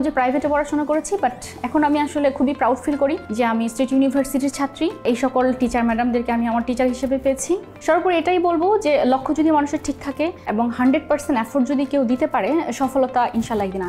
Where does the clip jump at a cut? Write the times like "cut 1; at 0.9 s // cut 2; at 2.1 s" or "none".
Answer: cut 1; at 3.2 s // cut 2; at 5.0 s // cut 3; at 7.7 s // cut 4; at 10.4 s